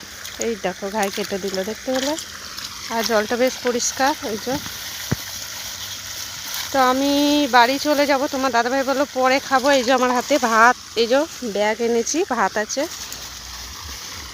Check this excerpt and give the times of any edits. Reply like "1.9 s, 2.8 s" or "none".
none

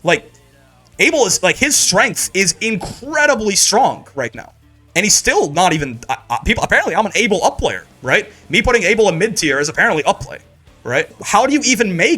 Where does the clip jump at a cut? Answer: 11.2 s

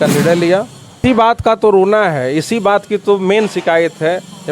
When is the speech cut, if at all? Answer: 1.0 s

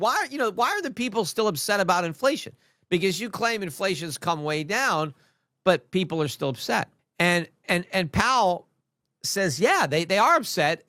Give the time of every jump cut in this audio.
7.0 s

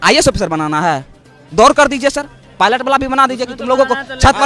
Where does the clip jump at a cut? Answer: none

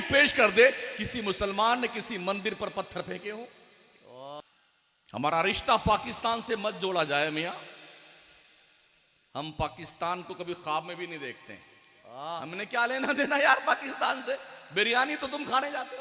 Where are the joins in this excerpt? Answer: 4.4 s

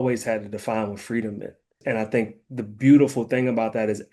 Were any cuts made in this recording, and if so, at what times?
1.8 s

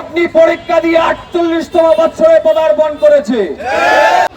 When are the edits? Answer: none

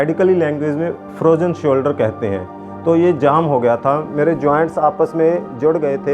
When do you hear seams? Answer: none

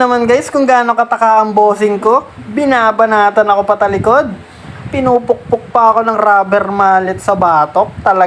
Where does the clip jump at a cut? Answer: none

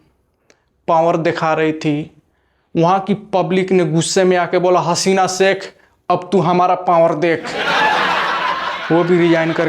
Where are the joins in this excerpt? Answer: 7.6 s, 8.9 s

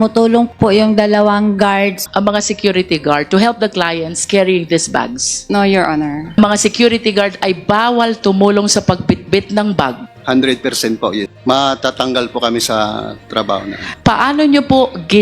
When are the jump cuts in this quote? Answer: 2.0 s, 6.3 s, 10.1 s, 11.2 s, 13.8 s

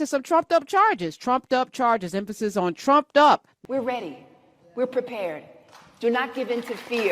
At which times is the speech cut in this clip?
3.5 s

